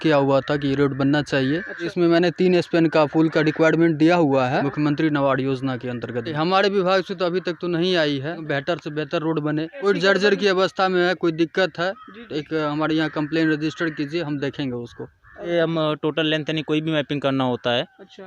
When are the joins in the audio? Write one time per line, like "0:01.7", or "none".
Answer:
0:01.9
0:04.7
0:06.3
0:08.4
0:09.8
0:15.5